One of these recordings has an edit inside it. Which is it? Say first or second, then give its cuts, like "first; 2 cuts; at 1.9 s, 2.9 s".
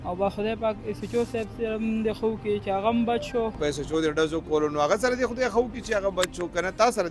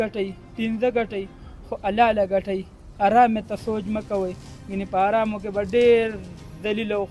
first; 1 cut; at 3.6 s